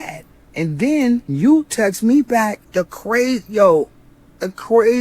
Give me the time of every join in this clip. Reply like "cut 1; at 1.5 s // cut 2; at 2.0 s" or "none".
cut 1; at 1.3 s // cut 2; at 2.6 s